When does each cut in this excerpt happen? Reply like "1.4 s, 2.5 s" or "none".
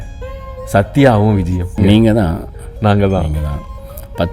1.8 s